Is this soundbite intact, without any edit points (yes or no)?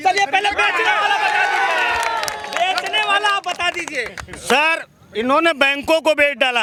yes